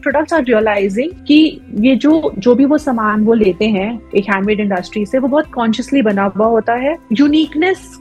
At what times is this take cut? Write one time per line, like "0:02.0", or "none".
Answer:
0:07.0